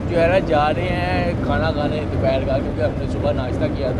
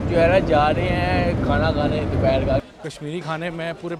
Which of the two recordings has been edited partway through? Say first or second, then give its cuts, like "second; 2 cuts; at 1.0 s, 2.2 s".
second; 1 cut; at 2.6 s